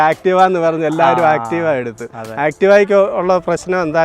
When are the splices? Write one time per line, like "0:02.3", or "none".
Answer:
none